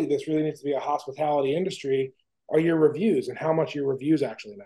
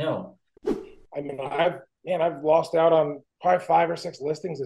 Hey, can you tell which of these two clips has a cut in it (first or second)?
second